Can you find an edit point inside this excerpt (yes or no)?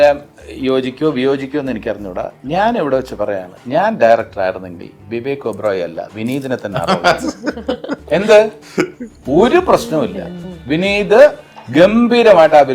no